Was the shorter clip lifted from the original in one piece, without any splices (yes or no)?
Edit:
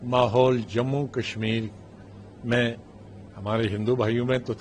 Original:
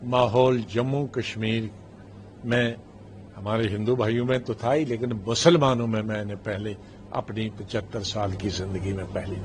yes